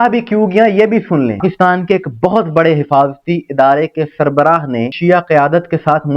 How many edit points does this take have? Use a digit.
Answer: 2